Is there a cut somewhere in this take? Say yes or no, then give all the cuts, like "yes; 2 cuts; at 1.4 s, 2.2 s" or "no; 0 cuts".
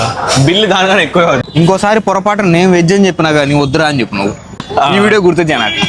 yes; 2 cuts; at 1.4 s, 4.6 s